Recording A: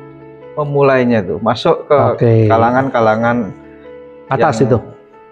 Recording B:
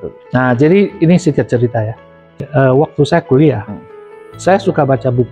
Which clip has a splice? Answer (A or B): B